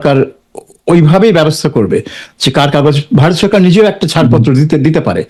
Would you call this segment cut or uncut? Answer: uncut